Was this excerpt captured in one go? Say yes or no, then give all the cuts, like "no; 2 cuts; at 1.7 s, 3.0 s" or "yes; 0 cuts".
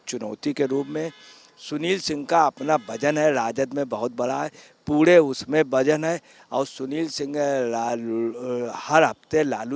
yes; 0 cuts